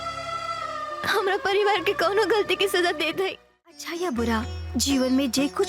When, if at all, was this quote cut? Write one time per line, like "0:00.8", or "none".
0:03.8